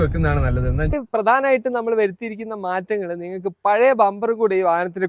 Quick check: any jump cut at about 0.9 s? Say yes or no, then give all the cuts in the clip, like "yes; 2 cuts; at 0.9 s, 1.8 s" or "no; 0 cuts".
yes; 1 cut; at 0.9 s